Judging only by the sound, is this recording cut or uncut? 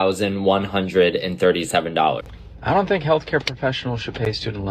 cut